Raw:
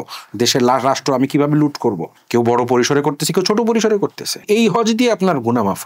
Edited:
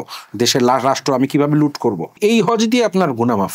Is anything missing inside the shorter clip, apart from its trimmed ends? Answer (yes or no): yes